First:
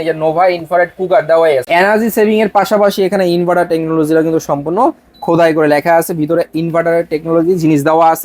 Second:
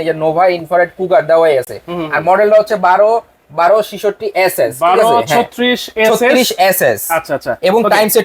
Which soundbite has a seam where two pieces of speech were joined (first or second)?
first